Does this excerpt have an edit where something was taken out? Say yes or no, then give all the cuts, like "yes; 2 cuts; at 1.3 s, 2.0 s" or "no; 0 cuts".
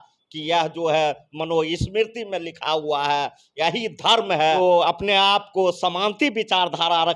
yes; 1 cut; at 4.6 s